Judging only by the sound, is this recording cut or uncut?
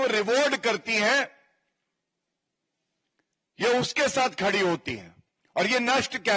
uncut